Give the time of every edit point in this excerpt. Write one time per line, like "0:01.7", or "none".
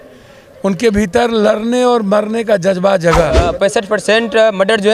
0:03.4